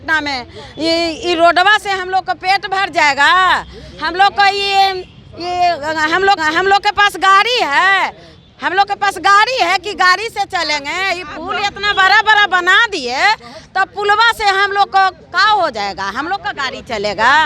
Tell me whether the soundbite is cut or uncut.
uncut